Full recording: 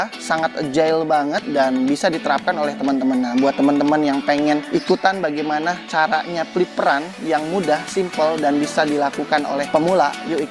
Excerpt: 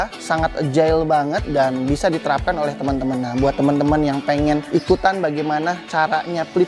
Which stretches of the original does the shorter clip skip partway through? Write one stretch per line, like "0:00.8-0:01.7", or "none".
none